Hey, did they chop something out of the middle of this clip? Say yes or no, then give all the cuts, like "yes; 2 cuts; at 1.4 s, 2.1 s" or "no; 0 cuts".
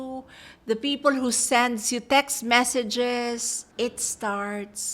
yes; 1 cut; at 3.6 s